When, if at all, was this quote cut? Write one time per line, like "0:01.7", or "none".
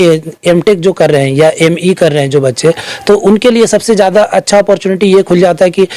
none